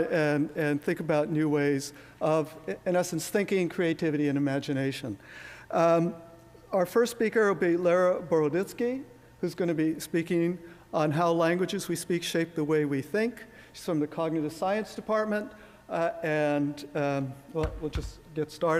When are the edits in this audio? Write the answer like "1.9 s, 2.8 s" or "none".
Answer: none